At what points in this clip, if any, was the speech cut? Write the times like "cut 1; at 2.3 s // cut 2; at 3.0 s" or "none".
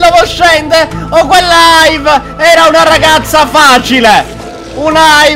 none